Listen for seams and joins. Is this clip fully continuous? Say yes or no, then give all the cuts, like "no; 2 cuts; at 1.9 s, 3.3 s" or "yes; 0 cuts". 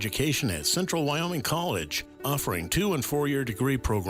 yes; 0 cuts